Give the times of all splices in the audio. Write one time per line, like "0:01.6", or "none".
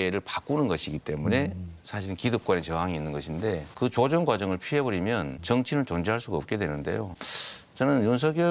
none